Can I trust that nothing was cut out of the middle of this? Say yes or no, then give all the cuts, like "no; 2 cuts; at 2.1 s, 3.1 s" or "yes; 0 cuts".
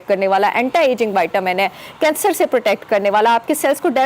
yes; 0 cuts